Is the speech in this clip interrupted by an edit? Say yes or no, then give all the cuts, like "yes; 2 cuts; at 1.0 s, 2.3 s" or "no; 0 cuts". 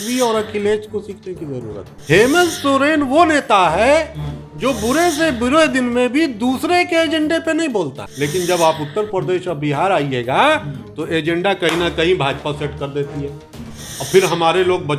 yes; 2 cuts; at 1.9 s, 8.0 s